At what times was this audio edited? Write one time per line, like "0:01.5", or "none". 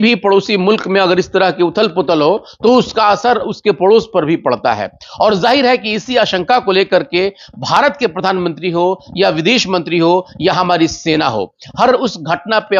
none